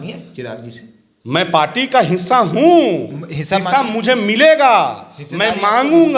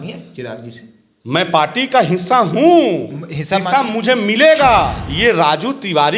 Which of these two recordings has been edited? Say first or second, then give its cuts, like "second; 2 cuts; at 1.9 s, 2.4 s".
second; 1 cut; at 5.0 s